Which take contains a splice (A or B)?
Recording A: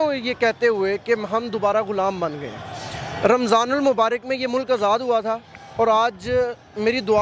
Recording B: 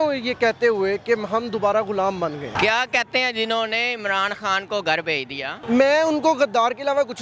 B